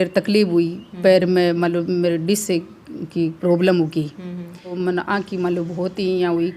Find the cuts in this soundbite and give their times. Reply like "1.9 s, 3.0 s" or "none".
4.6 s